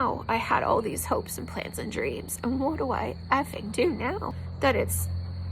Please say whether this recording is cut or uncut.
cut